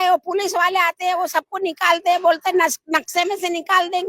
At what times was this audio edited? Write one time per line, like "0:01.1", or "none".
none